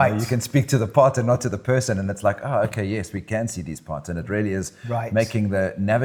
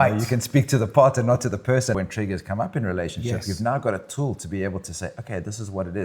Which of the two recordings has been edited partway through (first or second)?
second